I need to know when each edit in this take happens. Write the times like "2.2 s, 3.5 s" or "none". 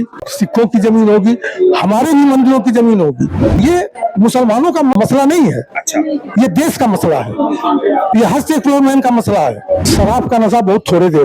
3.6 s, 5.0 s, 9.9 s